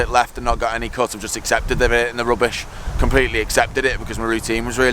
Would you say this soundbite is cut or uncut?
uncut